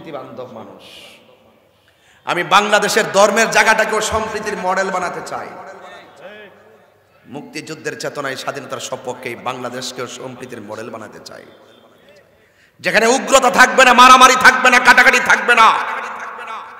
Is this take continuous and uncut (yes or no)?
yes